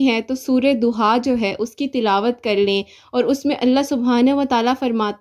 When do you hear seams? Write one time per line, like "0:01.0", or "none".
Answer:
none